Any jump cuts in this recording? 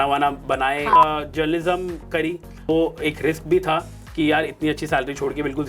yes; 2 cuts; at 1.0 s, 2.7 s

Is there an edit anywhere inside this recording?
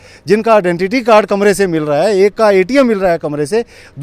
no; 0 cuts

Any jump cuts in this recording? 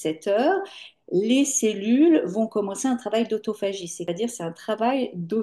yes; 1 cut; at 4.0 s

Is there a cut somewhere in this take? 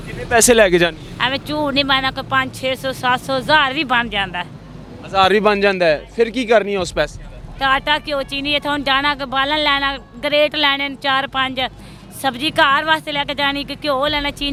no; 0 cuts

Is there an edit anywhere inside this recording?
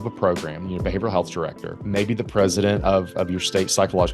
yes; 1 cut; at 1.7 s

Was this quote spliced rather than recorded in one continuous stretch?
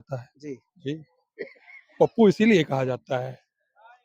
no; 0 cuts

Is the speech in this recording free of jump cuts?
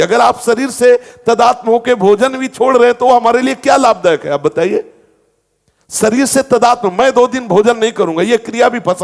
yes; 0 cuts

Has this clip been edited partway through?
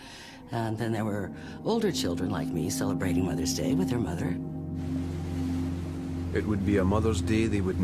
yes; 1 cut; at 4.1 s

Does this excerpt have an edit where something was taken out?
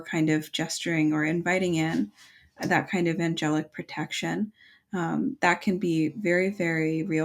no; 0 cuts

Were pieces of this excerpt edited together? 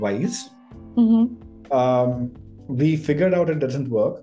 no; 0 cuts

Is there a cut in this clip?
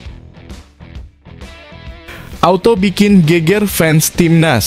yes; 1 cut; at 2.4 s

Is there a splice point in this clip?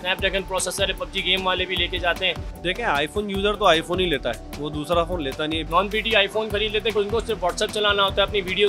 yes; 3 cuts; at 2.5 s, 5.6 s, 6.9 s

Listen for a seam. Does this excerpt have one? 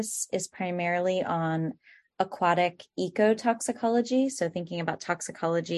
no; 0 cuts

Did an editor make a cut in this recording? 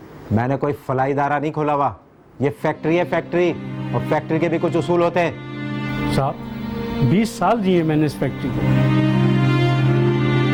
no; 0 cuts

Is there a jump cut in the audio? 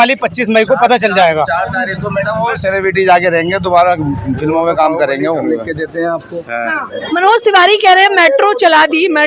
yes; 2 cuts; at 5.4 s, 6.9 s

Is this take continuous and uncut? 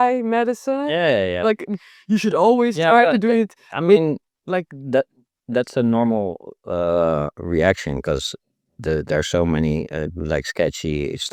yes; 0 cuts

